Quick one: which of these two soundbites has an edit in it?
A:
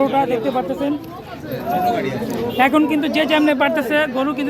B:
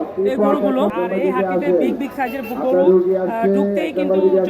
B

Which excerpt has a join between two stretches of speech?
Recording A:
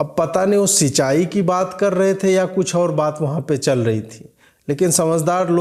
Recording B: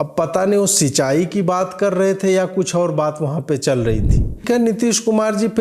B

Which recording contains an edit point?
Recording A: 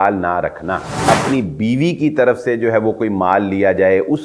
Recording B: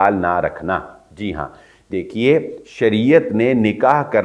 A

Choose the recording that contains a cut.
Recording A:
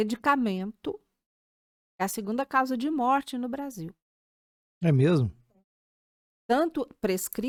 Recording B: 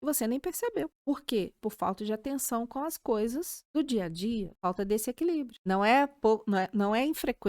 B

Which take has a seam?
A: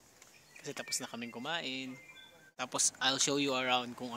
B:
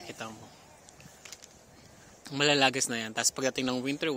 A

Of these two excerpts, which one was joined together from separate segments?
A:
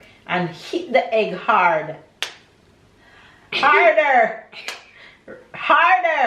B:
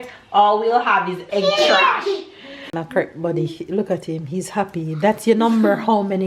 B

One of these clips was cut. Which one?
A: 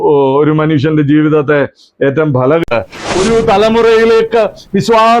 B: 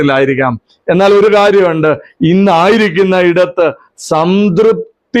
A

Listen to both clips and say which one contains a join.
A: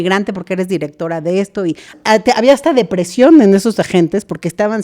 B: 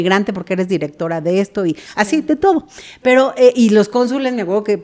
A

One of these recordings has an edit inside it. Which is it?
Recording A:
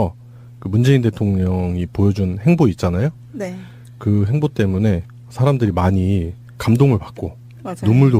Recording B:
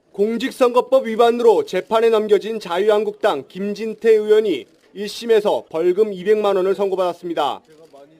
A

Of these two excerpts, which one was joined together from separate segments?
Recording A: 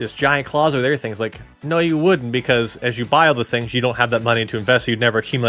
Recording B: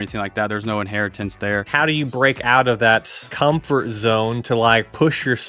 B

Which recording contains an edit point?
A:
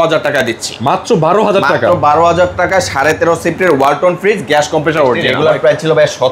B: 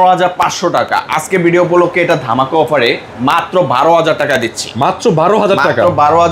A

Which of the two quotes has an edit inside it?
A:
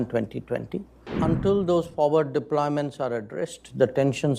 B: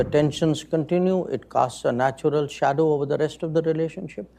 A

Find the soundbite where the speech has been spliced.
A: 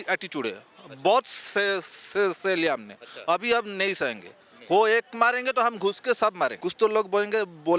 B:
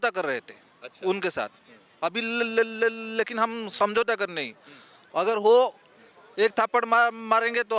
A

